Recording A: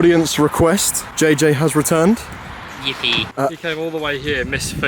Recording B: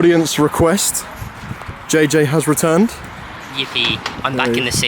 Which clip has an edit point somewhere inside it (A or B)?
A